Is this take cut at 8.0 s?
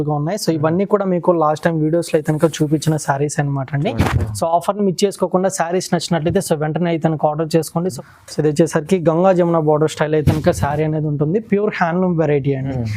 yes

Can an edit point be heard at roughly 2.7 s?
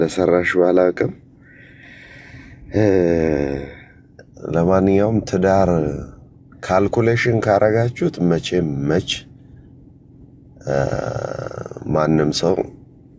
no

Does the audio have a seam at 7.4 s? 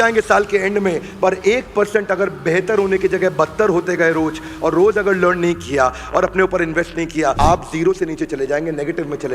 yes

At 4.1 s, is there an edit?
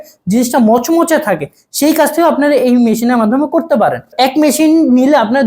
yes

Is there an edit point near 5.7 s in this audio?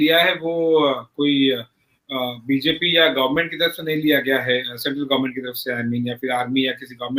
no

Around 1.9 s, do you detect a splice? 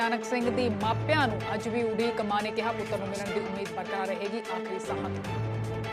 no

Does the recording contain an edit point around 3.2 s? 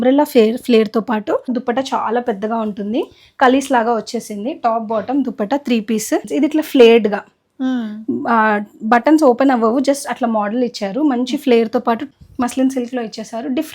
no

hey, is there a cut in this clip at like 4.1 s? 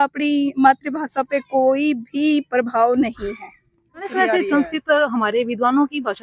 yes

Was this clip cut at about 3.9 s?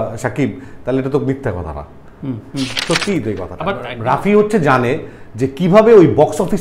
yes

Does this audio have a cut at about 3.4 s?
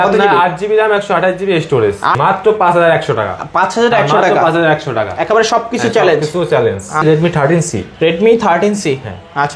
no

